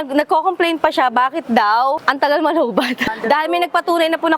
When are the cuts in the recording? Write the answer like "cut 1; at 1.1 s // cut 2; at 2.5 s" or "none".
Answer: cut 1; at 2.0 s // cut 2; at 3.2 s